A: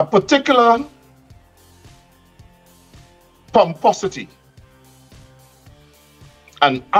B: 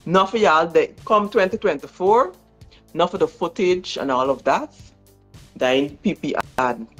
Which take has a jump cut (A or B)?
A